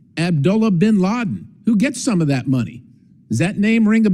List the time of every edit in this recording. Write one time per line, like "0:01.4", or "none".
none